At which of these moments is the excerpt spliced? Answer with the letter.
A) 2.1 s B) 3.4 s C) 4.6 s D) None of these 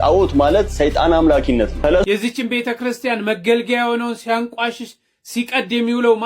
A